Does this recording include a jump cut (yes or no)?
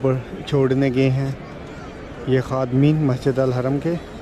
no